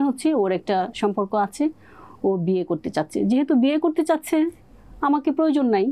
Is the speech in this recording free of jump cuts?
yes; 0 cuts

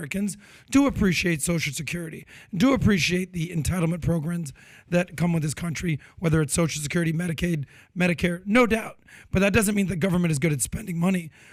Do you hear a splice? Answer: no; 0 cuts

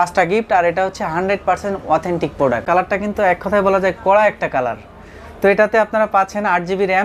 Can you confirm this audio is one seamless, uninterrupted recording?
no; 1 cut; at 2.6 s

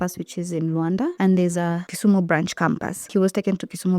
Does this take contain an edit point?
yes; 3 cuts; at 1.1 s, 1.9 s, 3.1 s

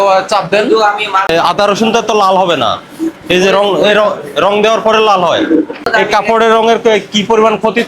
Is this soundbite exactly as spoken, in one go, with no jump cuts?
no; 2 cuts; at 1.3 s, 5.9 s

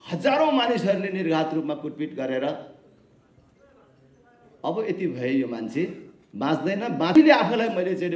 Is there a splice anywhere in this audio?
yes; 1 cut; at 7.2 s

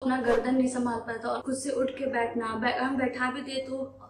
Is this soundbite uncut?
no; 1 cut; at 1.4 s

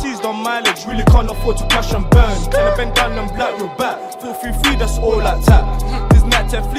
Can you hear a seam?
no; 0 cuts

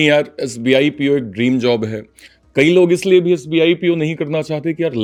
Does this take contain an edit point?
no; 0 cuts

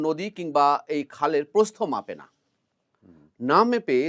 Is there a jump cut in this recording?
no; 0 cuts

